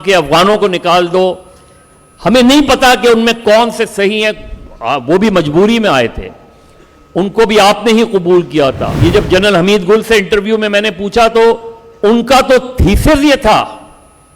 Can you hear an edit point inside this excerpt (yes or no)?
yes